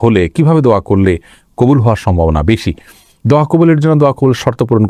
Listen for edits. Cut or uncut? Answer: uncut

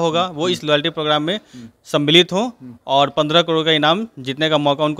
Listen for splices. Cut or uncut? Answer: uncut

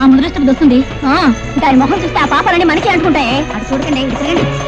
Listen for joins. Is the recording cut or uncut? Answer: uncut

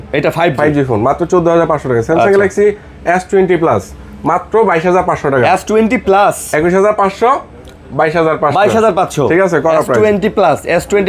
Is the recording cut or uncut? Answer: uncut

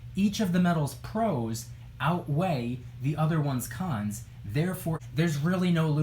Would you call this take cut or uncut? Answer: cut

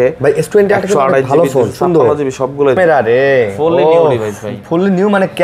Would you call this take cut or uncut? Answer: cut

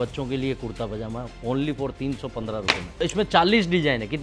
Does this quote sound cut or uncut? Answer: cut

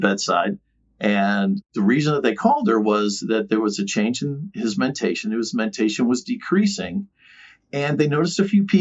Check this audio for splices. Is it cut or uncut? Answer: cut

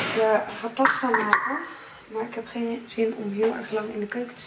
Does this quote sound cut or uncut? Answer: uncut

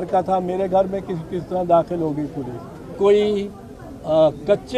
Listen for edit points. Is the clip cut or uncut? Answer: cut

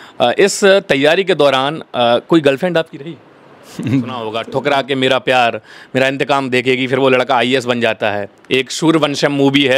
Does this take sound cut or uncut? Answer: cut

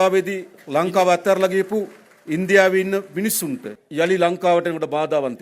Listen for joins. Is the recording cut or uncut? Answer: cut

